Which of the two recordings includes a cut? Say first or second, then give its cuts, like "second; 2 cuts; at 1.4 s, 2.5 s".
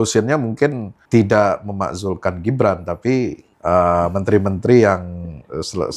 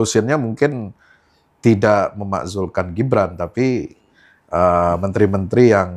first; 2 cuts; at 0.9 s, 3.5 s